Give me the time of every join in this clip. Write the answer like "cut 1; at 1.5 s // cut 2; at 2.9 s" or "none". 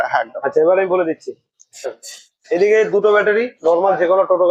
none